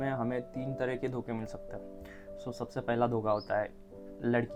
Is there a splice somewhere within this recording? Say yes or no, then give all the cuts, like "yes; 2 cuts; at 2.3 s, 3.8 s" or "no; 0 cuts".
no; 0 cuts